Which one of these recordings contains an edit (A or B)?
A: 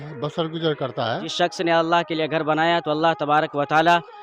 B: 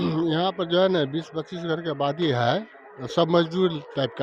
A